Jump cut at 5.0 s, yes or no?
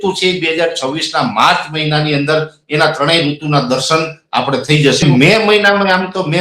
yes